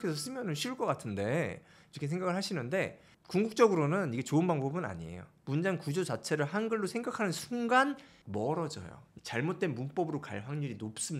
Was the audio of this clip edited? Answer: yes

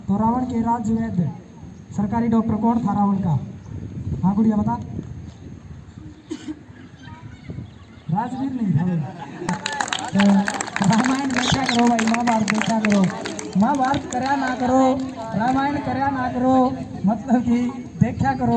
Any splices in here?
no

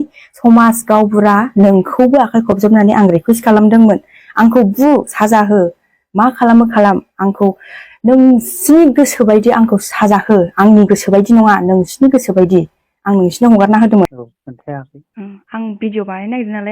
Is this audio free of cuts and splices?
no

